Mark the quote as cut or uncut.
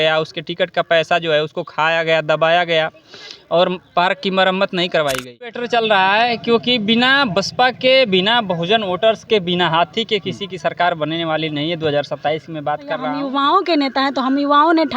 cut